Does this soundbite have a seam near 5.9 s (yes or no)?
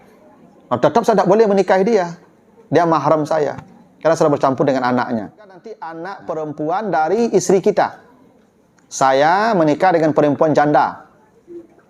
yes